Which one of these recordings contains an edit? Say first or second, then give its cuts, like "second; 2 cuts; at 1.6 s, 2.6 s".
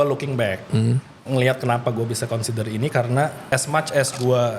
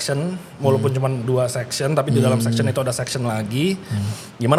first; 1 cut; at 3.5 s